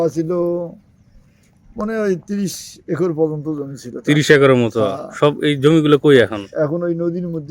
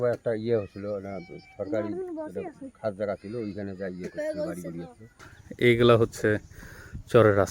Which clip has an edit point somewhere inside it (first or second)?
second